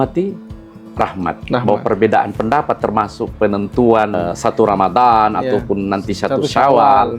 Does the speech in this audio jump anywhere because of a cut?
yes; 1 cut; at 4.2 s

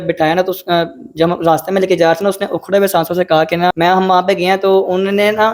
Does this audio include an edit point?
yes; 1 cut; at 3.7 s

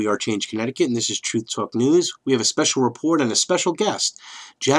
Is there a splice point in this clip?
yes; 1 cut; at 1.6 s

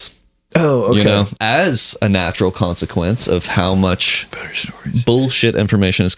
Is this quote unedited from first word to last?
no; 1 cut; at 1.3 s

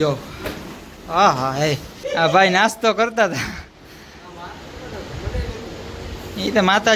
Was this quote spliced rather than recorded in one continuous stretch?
yes; 1 cut; at 2.0 s

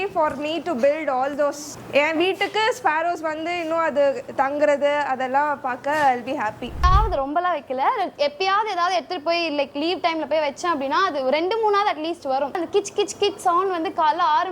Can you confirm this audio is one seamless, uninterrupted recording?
no; 3 cuts; at 1.7 s, 6.8 s, 12.6 s

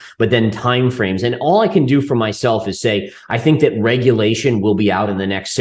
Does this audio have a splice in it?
no; 0 cuts

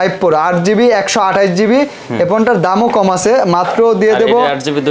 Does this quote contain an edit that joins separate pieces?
no; 0 cuts

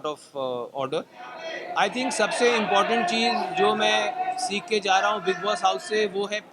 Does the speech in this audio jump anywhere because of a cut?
yes; 1 cut; at 1.5 s

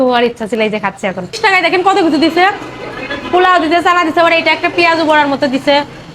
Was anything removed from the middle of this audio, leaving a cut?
yes; 1 cut; at 1.4 s

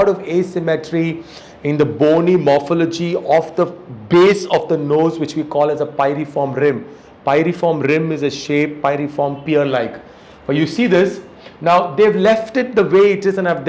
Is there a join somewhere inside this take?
no; 0 cuts

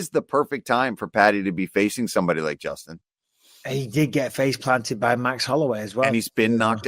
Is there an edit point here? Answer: yes; 1 cut; at 1.9 s

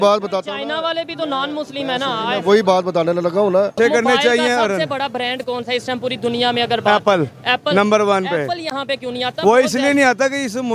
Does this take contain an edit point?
yes; 1 cut; at 3.7 s

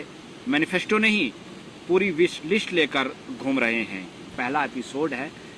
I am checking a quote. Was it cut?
yes; 1 cut; at 4.3 s

